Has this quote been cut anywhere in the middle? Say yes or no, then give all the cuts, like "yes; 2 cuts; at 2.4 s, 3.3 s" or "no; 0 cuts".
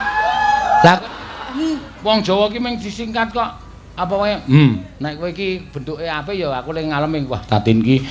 yes; 1 cut; at 1.0 s